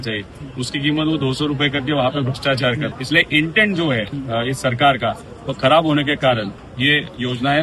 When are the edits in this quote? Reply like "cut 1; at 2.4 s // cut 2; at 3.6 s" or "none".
cut 1; at 3.0 s // cut 2; at 4.1 s // cut 3; at 6.6 s